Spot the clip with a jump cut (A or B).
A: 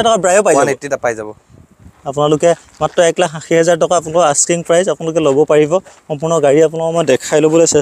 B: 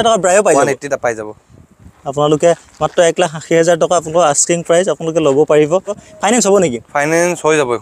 B